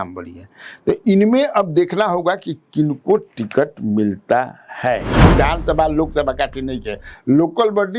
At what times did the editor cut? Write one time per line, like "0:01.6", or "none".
0:05.1